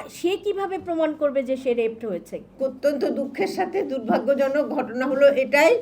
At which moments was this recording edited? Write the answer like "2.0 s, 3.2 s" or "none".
2.5 s